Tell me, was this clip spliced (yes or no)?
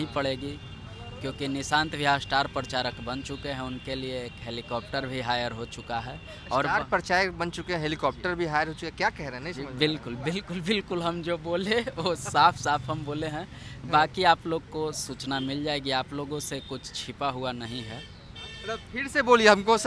no